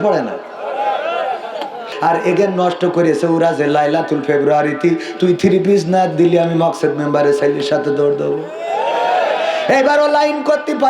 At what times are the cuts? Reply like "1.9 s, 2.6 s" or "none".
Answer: 1.9 s